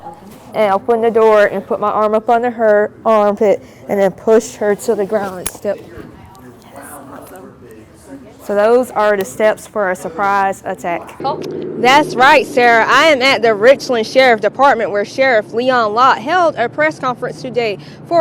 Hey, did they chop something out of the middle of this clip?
yes; 1 cut; at 11.1 s

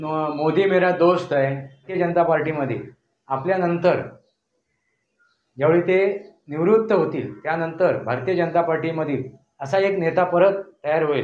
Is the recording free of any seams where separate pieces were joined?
no; 1 cut; at 1.9 s

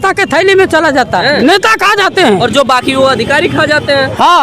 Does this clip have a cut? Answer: yes; 1 cut; at 1.2 s

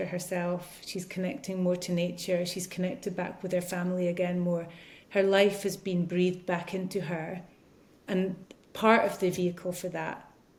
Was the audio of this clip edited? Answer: no; 0 cuts

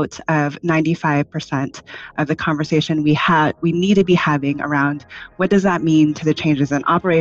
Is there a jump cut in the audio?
no; 0 cuts

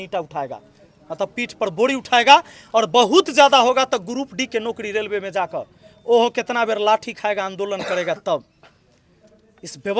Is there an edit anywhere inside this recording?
no; 0 cuts

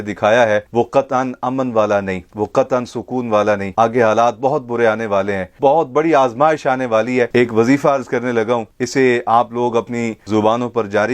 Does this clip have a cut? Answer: yes; 3 cuts; at 5.4 s, 7.3 s, 10.2 s

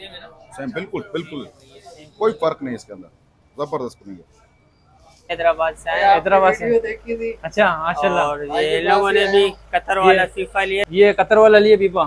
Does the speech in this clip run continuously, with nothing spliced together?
no; 2 cuts; at 5.3 s, 10.9 s

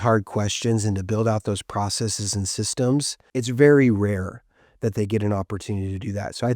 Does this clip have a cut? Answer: yes; 1 cut; at 3.2 s

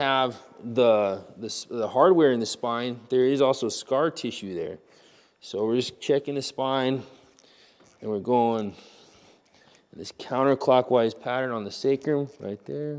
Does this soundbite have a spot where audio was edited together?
no; 0 cuts

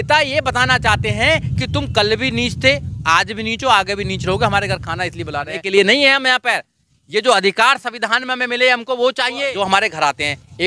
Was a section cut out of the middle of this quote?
yes; 2 cuts; at 5.6 s, 9.4 s

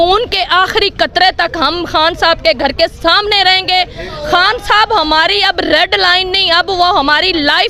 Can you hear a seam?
no; 0 cuts

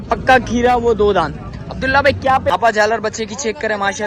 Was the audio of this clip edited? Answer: yes; 1 cut; at 2.5 s

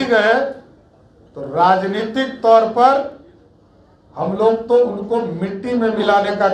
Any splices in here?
no; 0 cuts

